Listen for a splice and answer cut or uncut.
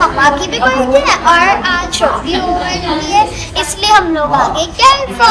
uncut